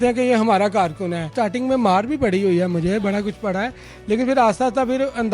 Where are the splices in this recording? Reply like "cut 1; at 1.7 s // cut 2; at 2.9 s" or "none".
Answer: cut 1; at 1.3 s